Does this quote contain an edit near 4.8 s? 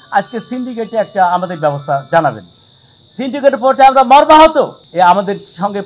yes; 1 cut; at 4.8 s

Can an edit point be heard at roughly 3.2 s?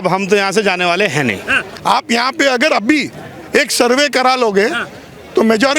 no; 1 cut; at 1.6 s

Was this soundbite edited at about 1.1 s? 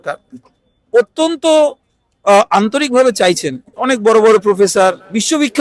no; 1 cut; at 3.7 s

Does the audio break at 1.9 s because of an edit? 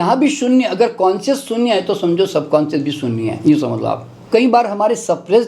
no; 1 cut; at 4.3 s

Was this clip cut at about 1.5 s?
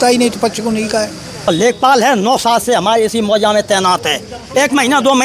yes; 1 cut; at 1.5 s

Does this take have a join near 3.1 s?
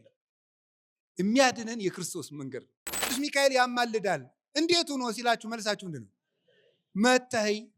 yes; 1 cut; at 3.1 s

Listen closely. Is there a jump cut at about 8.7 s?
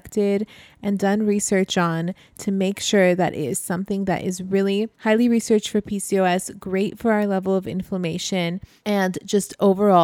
yes; 2 cuts; at 4.9 s, 8.7 s

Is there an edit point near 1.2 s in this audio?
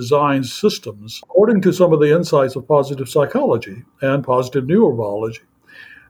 yes; 1 cut; at 1.2 s

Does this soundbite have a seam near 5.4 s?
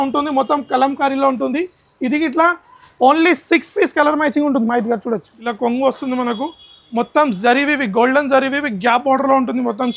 yes; 1 cut; at 5.4 s

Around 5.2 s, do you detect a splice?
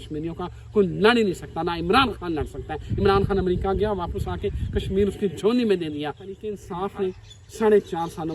no; 1 cut; at 6.6 s

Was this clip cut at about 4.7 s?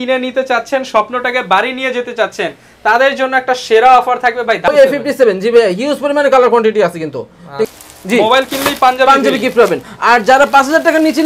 yes; 2 cuts; at 4.7 s, 7.6 s

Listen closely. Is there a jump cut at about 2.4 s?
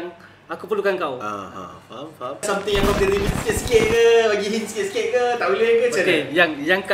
yes; 1 cut; at 2.4 s

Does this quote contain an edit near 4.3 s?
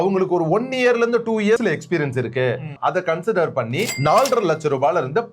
no; 2 cuts; at 1.6 s, 2.7 s

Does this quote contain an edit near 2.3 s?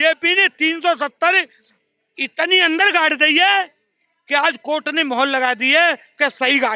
no; 0 cuts

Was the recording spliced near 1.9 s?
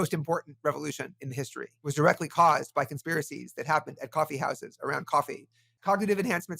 yes; 2 cuts; at 1.9 s, 5.8 s

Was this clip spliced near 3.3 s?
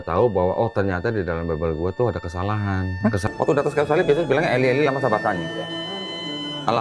yes; 1 cut; at 3.3 s

